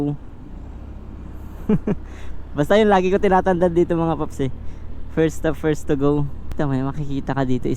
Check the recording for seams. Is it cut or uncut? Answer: cut